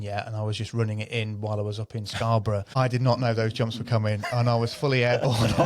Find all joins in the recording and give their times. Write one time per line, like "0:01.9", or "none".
0:02.7